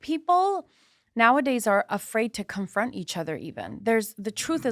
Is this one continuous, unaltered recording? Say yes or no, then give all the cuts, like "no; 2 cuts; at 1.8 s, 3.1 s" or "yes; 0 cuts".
yes; 0 cuts